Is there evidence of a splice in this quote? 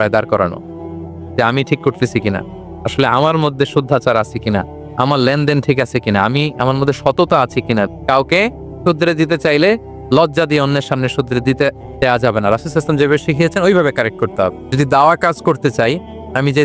yes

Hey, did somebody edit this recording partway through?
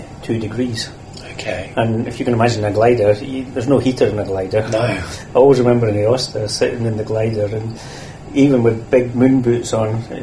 yes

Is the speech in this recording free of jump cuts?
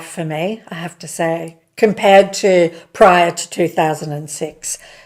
yes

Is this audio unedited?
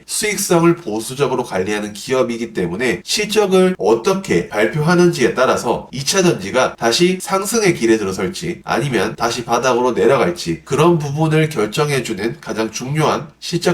no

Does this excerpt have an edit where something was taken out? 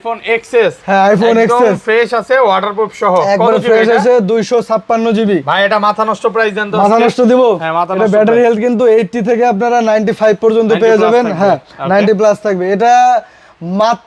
no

